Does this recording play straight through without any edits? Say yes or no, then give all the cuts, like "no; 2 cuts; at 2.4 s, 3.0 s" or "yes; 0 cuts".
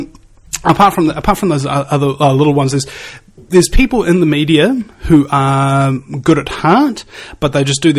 yes; 0 cuts